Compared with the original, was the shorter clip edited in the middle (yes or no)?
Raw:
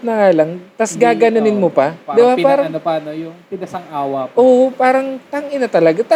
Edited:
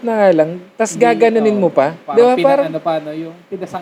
no